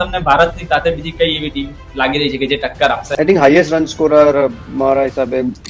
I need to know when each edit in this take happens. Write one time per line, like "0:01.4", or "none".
0:03.1